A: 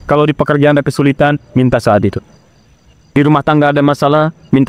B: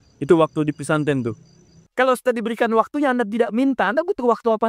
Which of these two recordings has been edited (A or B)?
B